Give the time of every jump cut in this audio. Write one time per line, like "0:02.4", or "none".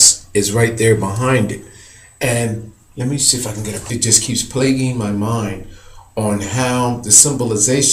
none